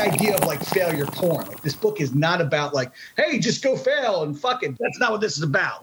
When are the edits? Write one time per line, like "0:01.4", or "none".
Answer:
0:04.3